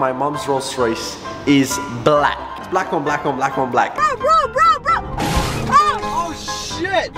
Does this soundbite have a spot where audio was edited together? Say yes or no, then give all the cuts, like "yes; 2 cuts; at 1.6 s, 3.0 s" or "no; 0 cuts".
yes; 2 cuts; at 2.6 s, 3.8 s